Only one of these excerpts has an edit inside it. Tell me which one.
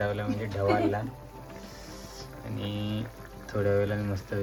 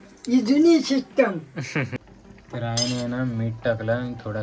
second; 1 cut; at 1.9 s

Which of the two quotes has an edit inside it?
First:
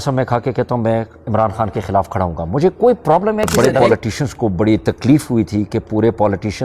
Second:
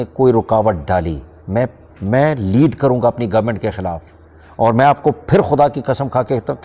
first; 1 cut; at 3.5 s

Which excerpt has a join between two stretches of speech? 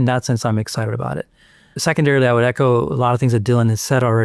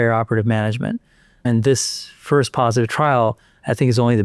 first; 1 cut; at 1.7 s

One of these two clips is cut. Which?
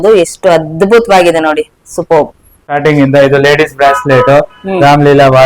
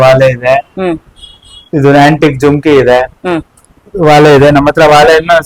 first; 1 cut; at 2.8 s

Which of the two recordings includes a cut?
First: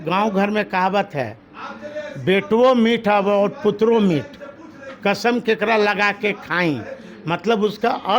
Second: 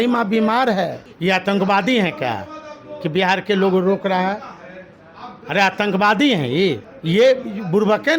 second; 2 cuts; at 1.1 s, 6.9 s

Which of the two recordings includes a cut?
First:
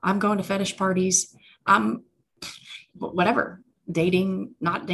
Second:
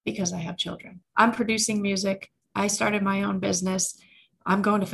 second; 1 cut; at 0.9 s

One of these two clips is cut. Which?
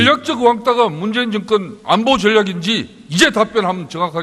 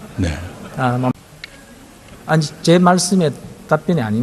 second; 1 cut; at 1.1 s

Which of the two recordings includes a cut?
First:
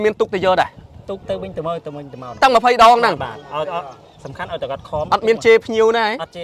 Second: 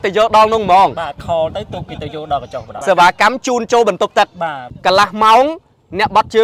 second; 2 cuts; at 2.7 s, 4.7 s

